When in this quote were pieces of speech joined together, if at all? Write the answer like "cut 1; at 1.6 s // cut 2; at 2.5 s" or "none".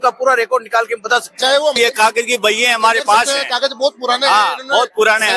cut 1; at 1.8 s

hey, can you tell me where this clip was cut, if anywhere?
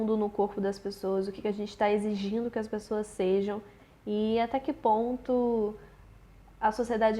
none

